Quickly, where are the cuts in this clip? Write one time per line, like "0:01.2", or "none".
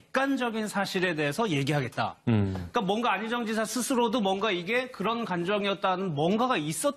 0:02.0